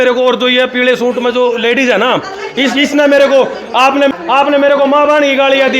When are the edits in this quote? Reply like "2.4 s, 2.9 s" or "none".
4.2 s